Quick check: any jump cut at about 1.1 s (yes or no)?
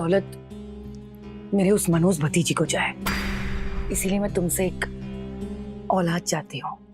no